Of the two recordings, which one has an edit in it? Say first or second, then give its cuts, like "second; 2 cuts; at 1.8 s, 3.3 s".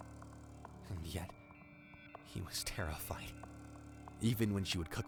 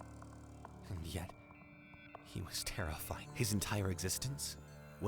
second; 1 cut; at 3.3 s